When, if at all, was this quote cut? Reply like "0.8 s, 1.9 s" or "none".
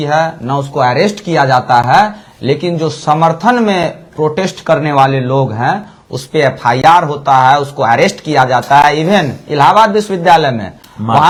none